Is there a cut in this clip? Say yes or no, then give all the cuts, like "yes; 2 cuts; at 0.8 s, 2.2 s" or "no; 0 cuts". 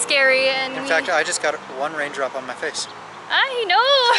no; 0 cuts